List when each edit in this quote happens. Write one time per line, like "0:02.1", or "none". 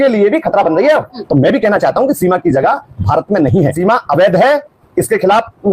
0:01.1
0:03.8